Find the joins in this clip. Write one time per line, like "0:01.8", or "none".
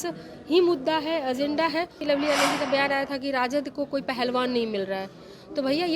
0:02.0